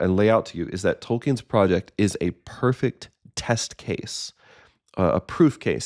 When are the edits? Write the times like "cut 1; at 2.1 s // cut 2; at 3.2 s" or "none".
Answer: none